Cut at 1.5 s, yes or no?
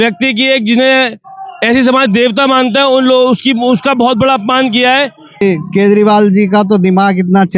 no